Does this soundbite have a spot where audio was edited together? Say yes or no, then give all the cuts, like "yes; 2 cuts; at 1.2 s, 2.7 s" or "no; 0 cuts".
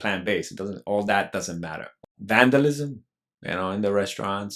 yes; 1 cut; at 2.0 s